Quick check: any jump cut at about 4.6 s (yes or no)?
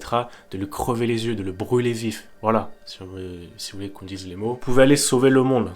yes